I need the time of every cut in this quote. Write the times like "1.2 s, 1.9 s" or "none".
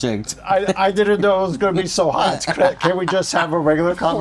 none